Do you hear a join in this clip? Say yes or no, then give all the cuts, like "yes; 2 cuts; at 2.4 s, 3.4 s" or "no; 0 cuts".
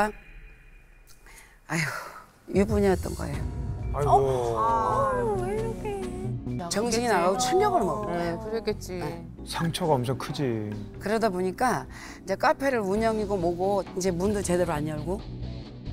yes; 1 cut; at 6.6 s